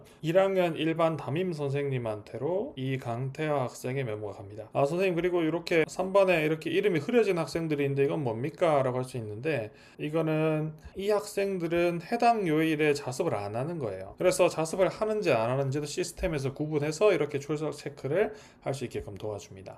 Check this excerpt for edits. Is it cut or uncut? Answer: cut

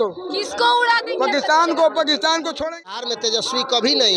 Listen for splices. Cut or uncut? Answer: cut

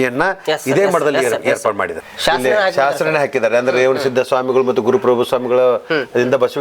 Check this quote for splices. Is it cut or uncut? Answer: cut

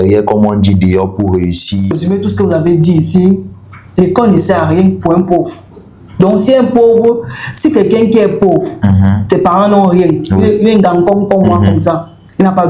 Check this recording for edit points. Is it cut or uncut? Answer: cut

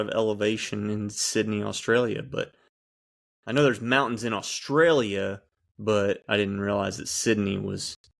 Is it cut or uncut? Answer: uncut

